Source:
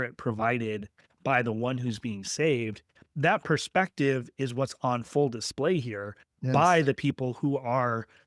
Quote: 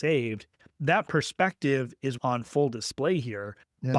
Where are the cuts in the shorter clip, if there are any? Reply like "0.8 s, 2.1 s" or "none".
2.2 s